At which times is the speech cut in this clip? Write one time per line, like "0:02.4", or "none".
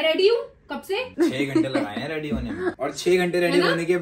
0:01.1
0:02.8

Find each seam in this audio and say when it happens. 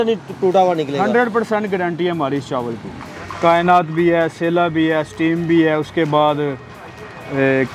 0:02.9

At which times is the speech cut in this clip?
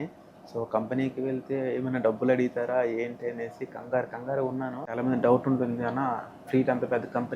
0:05.0

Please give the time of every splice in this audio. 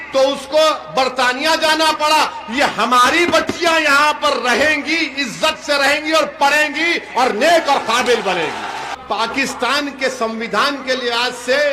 0:08.9

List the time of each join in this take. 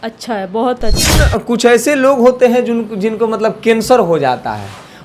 0:01.2

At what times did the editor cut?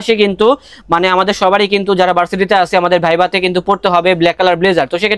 none

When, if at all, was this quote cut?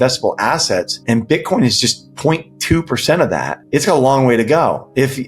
0:00.9
0:03.6

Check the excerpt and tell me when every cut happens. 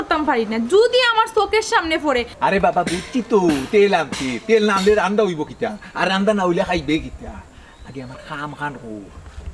0:02.3

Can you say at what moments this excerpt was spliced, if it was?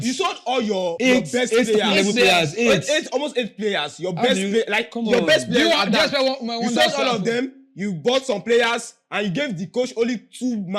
0:00.9

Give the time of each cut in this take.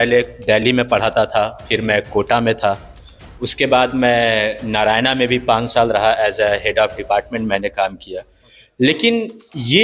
none

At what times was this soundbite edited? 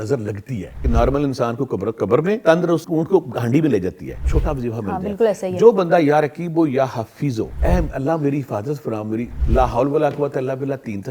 0:00.8
0:02.6
0:04.3
0:07.5
0:09.4

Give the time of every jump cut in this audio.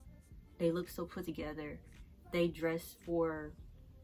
none

